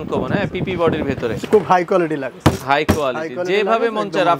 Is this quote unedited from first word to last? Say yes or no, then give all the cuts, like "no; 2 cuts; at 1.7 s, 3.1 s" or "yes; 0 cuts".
no; 1 cut; at 1.4 s